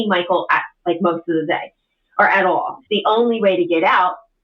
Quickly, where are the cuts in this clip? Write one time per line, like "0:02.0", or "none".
0:02.8